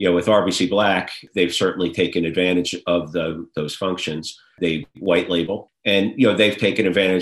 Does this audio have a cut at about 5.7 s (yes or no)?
yes